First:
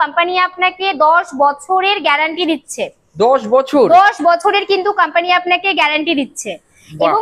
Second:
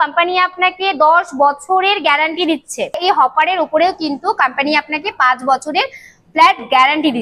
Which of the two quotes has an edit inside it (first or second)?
second